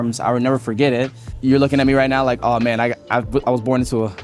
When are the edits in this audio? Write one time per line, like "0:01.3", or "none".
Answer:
0:01.2